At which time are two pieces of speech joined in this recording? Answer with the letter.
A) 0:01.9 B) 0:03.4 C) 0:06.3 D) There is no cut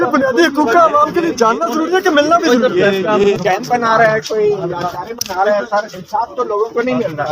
B